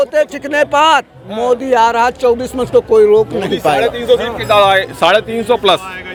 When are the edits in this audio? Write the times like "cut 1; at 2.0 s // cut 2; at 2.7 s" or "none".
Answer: none